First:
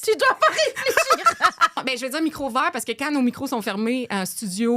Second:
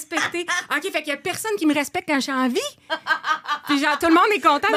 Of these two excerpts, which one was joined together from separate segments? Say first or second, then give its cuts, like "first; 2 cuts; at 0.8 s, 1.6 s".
first; 1 cut; at 1.8 s